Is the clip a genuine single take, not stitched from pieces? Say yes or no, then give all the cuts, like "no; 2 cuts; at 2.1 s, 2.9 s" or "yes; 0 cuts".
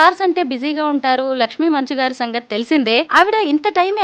no; 1 cut; at 3.1 s